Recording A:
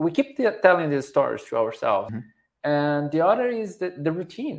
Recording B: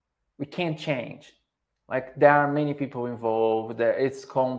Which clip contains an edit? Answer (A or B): A